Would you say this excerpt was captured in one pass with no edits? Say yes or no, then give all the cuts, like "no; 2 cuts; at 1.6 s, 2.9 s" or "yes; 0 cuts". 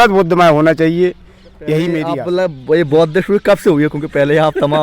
no; 1 cut; at 2.2 s